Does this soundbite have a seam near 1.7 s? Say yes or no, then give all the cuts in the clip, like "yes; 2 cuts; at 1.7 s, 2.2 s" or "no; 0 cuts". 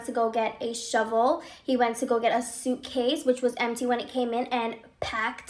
no; 0 cuts